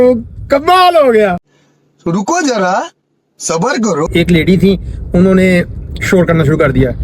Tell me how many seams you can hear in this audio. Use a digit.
1